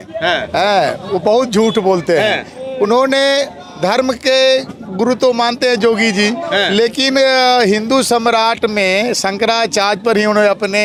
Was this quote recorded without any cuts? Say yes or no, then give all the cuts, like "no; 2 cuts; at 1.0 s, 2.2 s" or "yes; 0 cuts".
yes; 0 cuts